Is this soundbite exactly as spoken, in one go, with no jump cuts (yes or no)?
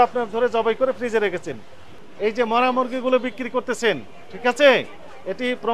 no